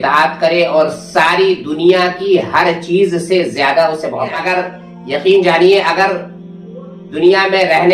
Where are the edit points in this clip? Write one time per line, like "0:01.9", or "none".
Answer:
0:04.4